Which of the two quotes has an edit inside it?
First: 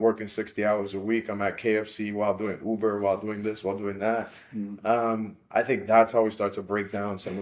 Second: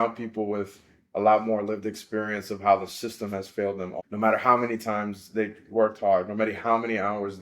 second; 1 cut; at 3.9 s

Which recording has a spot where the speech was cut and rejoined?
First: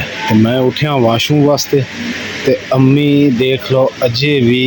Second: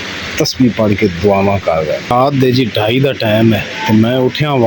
second; 1 cut; at 2.1 s

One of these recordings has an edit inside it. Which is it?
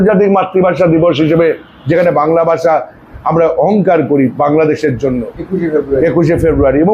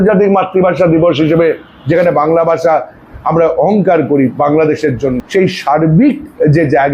second; 1 cut; at 5.2 s

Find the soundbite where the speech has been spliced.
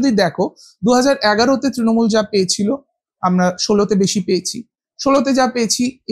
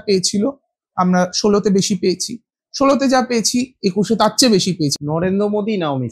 second; 1 cut; at 4.9 s

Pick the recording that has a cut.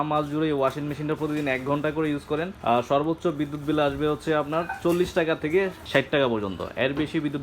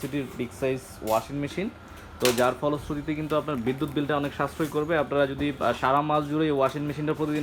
first; 2 cuts; at 2.5 s, 5.8 s

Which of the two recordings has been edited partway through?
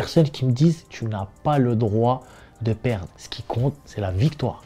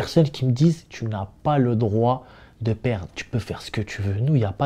second; 1 cut; at 3.1 s

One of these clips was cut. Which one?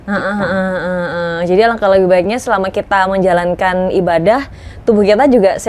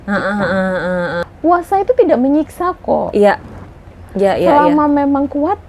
second; 1 cut; at 1.2 s

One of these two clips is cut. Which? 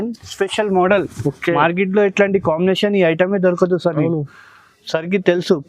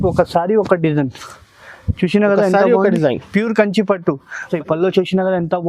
second; 1 cut; at 4.5 s

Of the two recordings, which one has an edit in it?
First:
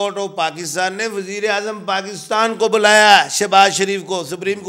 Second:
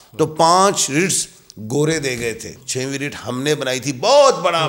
second; 1 cut; at 2.5 s

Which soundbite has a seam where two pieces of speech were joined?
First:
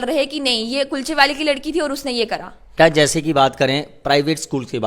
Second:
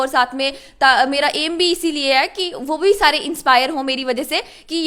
first; 1 cut; at 2.6 s

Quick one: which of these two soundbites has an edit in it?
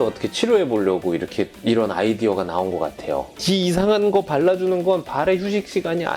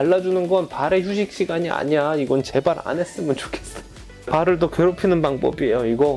first; 1 cut; at 3.3 s

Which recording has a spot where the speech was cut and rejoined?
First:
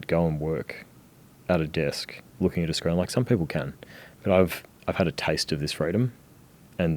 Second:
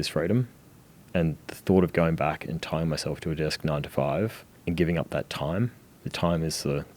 second; 1 cut; at 4.5 s

